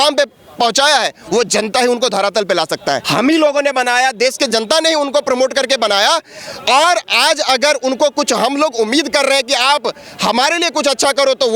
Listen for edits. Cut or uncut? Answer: cut